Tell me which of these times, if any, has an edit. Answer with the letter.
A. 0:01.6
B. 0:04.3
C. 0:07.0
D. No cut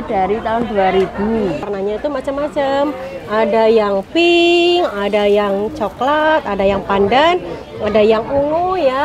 A